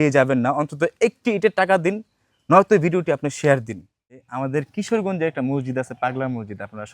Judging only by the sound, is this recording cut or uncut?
cut